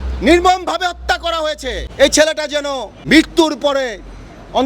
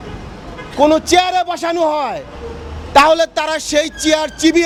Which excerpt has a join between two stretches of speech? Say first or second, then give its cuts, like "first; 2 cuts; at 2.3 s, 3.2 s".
first; 2 cuts; at 1.8 s, 2.9 s